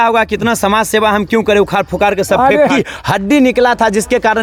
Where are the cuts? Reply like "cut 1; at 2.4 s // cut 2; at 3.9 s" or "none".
cut 1; at 2.8 s